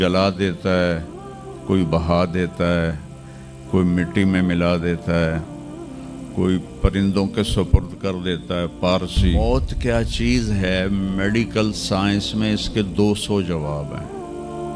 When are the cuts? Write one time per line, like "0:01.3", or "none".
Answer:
0:09.4